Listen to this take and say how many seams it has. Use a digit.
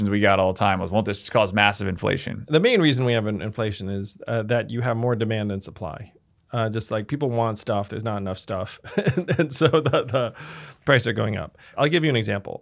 2